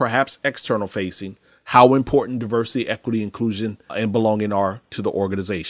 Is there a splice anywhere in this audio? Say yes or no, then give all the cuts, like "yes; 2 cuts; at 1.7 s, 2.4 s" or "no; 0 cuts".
yes; 1 cut; at 3.9 s